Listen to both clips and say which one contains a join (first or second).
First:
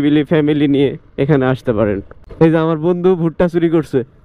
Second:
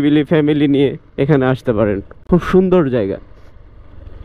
first